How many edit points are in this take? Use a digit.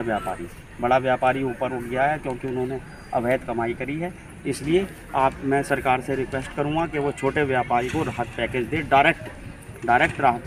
0